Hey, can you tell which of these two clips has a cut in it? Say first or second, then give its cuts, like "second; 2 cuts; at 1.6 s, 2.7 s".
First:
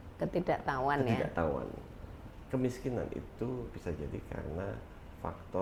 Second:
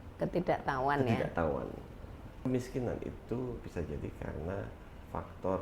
second; 1 cut; at 2.3 s